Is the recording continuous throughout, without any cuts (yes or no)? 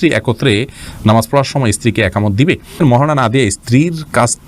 no